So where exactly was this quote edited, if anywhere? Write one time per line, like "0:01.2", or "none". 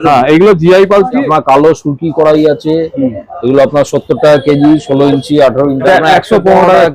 0:01.2
0:05.8